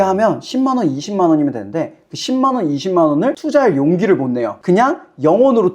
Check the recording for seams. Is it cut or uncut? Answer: cut